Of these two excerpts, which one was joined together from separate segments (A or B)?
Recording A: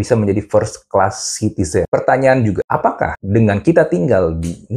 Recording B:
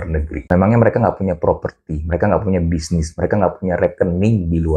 A